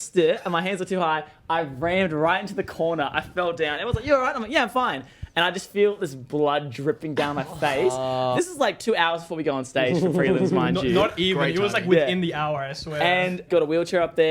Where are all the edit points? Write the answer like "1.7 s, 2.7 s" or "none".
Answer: 8.3 s, 13.5 s